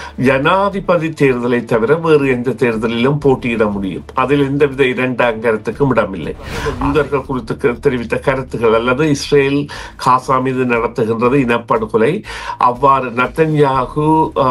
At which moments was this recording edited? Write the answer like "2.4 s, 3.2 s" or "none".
6.6 s